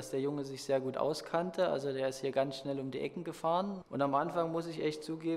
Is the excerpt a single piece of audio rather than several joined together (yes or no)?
no